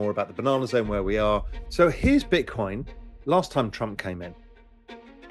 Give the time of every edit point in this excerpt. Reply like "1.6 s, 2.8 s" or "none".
1.6 s